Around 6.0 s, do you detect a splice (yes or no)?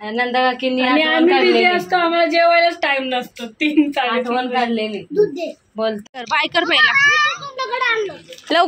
yes